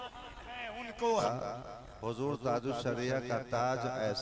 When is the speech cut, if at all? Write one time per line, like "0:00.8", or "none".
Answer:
0:01.2